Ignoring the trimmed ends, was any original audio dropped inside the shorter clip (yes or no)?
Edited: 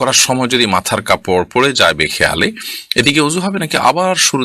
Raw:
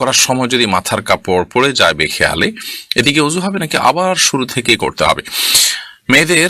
no